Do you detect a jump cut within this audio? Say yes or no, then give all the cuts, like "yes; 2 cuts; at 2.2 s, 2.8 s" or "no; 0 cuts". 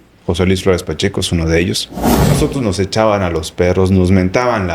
yes; 1 cut; at 2.4 s